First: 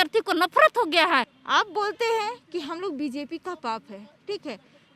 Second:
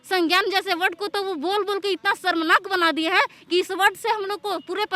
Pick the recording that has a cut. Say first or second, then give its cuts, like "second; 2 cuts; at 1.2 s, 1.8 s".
first; 1 cut; at 1.4 s